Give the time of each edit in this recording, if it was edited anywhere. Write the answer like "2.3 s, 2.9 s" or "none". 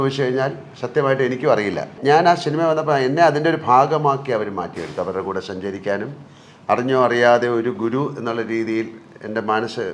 1.9 s